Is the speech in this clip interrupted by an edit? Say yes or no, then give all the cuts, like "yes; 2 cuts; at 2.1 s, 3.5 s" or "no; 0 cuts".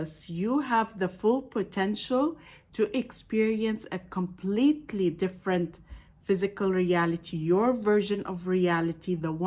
no; 0 cuts